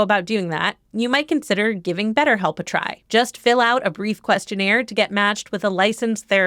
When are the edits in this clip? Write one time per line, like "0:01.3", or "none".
0:02.9